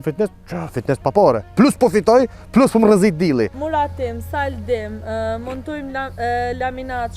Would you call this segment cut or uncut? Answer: cut